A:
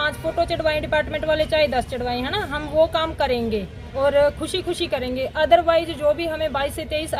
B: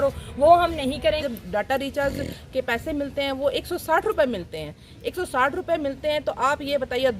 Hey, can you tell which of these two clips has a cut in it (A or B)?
B